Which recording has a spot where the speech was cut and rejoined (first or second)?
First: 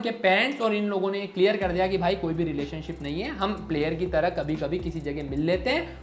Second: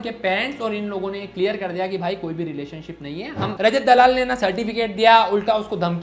second